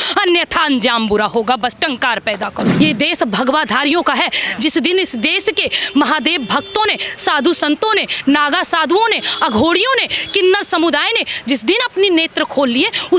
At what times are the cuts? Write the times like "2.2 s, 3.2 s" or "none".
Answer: 2.8 s